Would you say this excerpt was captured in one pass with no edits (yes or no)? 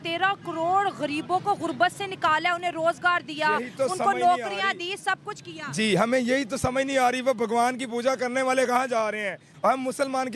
no